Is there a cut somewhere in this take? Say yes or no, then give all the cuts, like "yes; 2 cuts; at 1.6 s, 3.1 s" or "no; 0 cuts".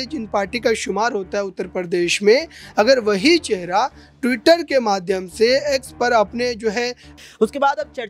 yes; 1 cut; at 7.1 s